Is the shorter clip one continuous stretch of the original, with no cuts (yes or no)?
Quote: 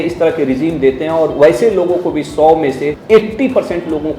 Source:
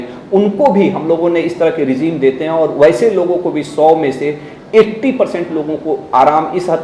no